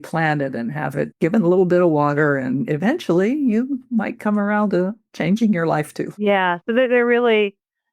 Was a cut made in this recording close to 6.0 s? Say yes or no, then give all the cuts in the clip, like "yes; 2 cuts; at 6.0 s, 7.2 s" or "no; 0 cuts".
yes; 2 cuts; at 1.1 s, 6.0 s